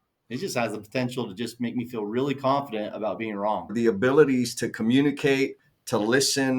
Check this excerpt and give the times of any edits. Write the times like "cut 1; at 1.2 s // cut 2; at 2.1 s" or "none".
cut 1; at 3.7 s